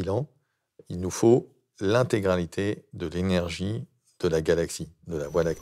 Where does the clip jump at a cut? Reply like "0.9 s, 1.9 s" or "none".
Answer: none